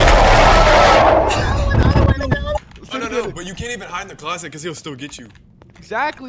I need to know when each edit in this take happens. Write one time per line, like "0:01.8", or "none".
0:02.6